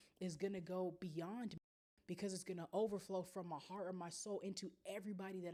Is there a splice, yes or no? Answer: no